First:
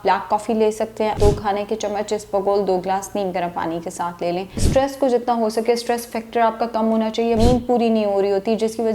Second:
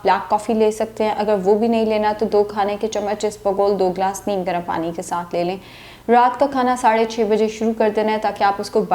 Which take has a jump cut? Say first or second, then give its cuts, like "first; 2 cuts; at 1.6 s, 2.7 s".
first; 3 cuts; at 1.2 s, 4.6 s, 7.4 s